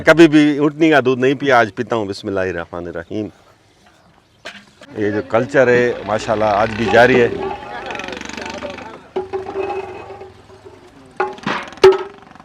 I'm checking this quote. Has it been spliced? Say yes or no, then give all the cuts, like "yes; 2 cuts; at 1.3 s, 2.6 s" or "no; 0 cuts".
yes; 1 cut; at 4.9 s